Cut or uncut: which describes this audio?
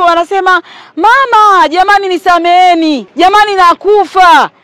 cut